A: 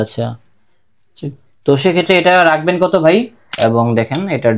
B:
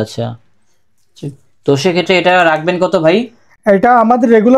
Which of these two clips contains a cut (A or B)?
A